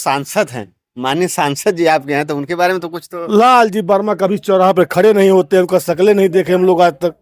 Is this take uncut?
yes; 0 cuts

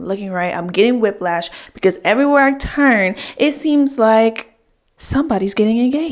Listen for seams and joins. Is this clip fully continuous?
yes; 0 cuts

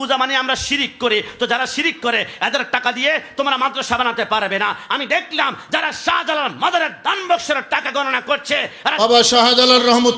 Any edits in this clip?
yes; 1 cut; at 8.8 s

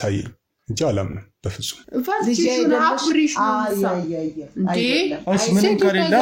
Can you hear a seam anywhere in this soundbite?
yes; 1 cut; at 1.8 s

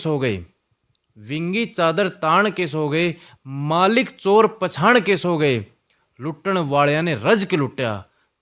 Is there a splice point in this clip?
no; 0 cuts

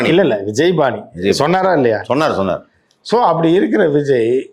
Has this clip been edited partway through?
no; 0 cuts

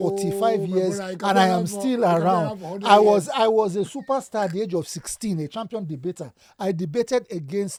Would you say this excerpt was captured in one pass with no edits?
yes; 0 cuts

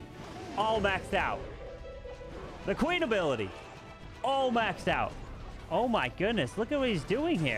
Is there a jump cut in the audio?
yes; 1 cut; at 5.2 s

